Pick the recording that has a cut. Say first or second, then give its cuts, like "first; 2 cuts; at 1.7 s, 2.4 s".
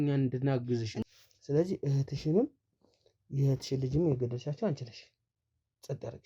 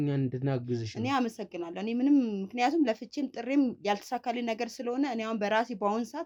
first; 1 cut; at 0.9 s